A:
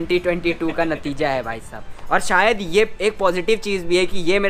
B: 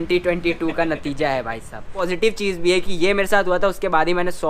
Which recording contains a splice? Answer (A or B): B